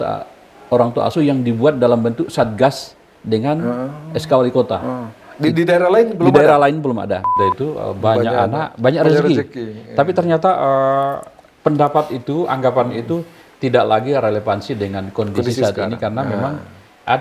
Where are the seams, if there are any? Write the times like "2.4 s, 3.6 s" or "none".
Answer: 7.3 s